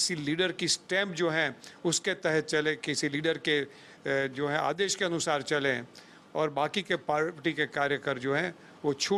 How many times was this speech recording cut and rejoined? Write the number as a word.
zero